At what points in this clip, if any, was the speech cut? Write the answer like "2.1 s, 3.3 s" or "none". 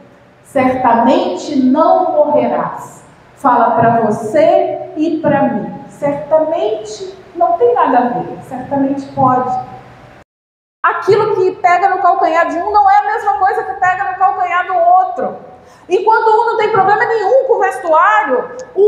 10.1 s